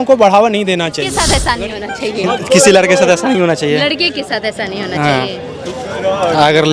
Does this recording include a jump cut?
yes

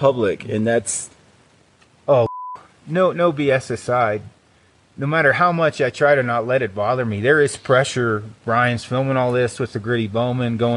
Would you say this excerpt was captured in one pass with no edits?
no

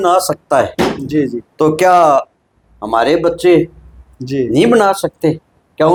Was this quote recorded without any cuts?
yes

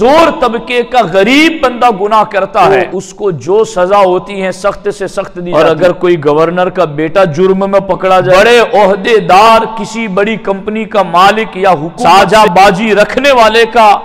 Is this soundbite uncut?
no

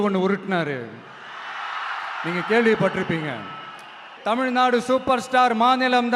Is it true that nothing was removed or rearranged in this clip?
no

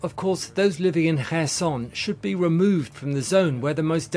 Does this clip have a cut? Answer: no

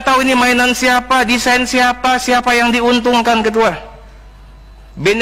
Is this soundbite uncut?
yes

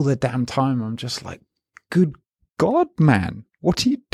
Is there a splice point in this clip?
no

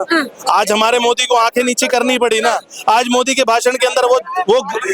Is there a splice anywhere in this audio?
no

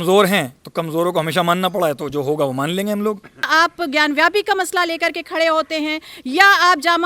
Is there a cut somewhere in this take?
yes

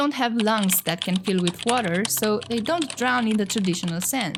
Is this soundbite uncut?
yes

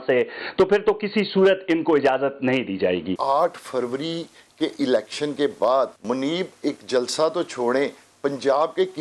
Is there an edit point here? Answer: yes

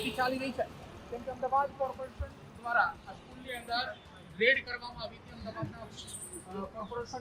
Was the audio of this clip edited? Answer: no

